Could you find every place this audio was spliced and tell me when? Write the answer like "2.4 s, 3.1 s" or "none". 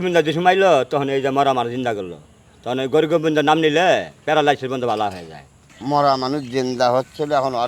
5.6 s